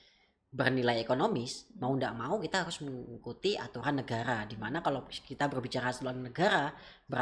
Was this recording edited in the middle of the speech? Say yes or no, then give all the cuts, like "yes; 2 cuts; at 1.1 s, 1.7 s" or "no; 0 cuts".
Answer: no; 0 cuts